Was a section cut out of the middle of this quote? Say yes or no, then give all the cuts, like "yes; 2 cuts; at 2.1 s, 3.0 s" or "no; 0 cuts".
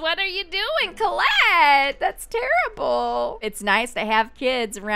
yes; 1 cut; at 3.4 s